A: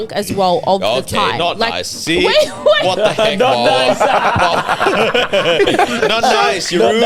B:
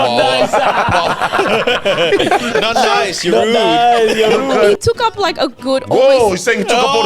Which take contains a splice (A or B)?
B